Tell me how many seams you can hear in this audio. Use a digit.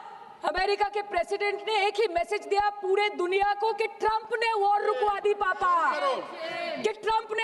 0